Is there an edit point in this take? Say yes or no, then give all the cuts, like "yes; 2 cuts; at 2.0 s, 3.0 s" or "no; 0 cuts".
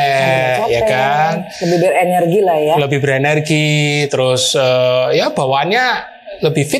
no; 0 cuts